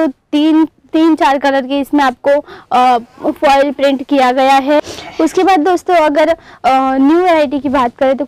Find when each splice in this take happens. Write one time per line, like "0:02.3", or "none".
0:04.8